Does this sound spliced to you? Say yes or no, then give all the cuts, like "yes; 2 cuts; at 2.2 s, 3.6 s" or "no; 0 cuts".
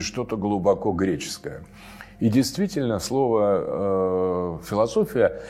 no; 0 cuts